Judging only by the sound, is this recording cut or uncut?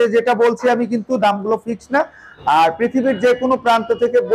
cut